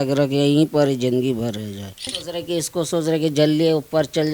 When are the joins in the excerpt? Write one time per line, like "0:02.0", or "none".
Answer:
0:02.2